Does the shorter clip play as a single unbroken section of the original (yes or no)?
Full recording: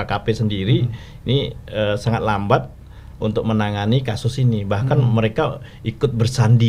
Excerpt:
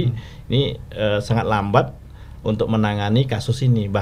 yes